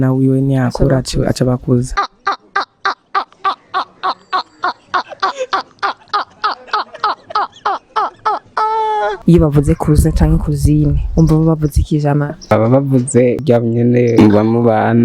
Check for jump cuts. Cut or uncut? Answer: uncut